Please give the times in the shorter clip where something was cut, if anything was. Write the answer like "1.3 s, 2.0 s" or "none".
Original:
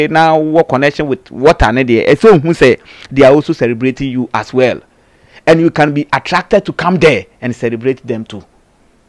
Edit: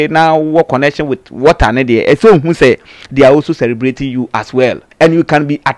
4.8 s